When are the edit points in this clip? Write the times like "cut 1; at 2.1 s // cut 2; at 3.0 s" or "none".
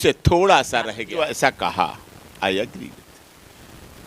cut 1; at 1.0 s